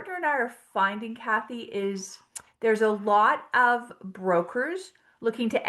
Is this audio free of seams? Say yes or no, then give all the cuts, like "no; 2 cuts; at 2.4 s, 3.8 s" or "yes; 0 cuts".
yes; 0 cuts